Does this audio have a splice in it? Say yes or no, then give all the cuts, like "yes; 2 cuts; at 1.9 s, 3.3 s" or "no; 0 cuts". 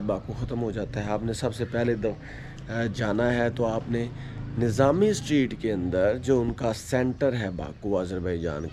no; 0 cuts